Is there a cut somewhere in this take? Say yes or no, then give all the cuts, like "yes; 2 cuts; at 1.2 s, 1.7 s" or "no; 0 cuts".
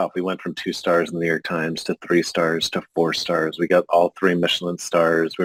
no; 0 cuts